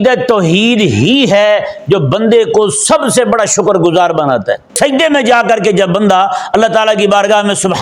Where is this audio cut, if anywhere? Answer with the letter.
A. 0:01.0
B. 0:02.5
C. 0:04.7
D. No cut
C